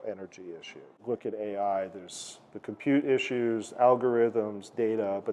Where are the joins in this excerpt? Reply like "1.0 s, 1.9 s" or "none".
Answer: 1.0 s